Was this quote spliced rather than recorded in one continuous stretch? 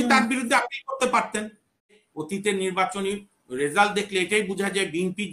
yes; 1 cut; at 1.9 s

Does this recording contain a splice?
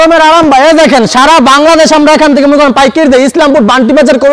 no; 0 cuts

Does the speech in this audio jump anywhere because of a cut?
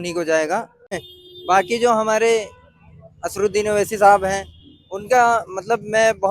yes; 1 cut; at 1.1 s

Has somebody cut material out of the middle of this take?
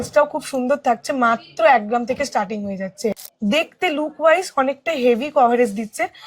yes; 1 cut; at 3.2 s

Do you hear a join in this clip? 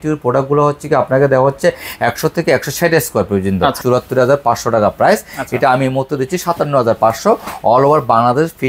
yes; 1 cut; at 3.8 s

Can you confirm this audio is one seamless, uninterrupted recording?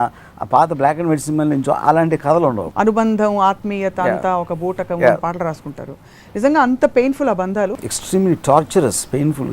no; 2 cuts; at 2.7 s, 7.8 s

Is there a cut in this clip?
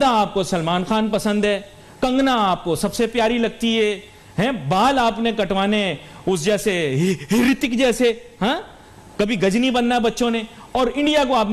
no; 0 cuts

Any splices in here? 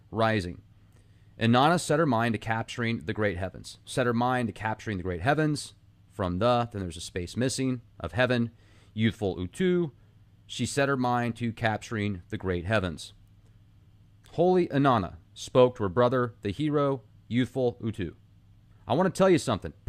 no; 0 cuts

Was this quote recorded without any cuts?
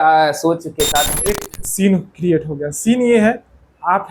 no; 1 cut; at 1.2 s

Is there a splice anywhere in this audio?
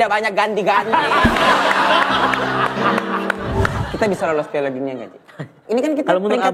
yes; 2 cuts; at 3.8 s, 5.6 s

